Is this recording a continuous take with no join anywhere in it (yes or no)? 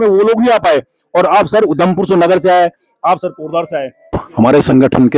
no